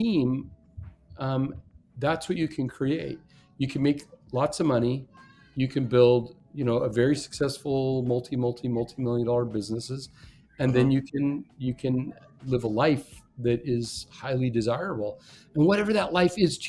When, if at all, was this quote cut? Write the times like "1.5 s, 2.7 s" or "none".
none